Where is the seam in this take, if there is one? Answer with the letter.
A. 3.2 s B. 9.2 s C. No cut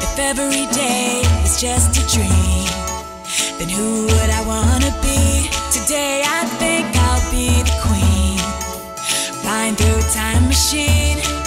C